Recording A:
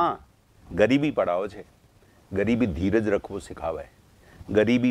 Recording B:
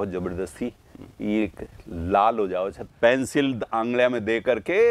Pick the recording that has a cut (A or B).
B